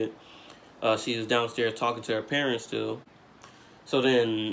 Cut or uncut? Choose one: uncut